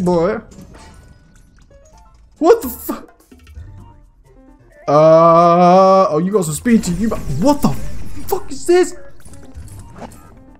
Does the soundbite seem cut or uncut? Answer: uncut